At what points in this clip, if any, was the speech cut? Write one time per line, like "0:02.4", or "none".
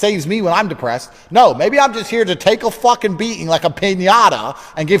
0:01.1